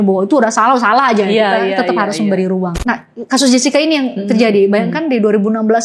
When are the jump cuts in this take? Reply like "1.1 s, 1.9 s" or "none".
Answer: 2.7 s